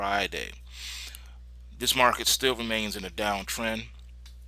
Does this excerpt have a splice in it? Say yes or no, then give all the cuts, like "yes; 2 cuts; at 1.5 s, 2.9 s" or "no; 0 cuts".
yes; 1 cut; at 2.2 s